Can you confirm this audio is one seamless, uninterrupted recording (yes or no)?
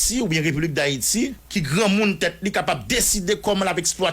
no